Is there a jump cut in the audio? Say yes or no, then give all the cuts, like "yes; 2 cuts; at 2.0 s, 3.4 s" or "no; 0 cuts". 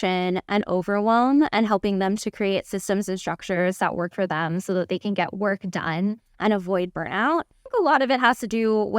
yes; 1 cut; at 7.7 s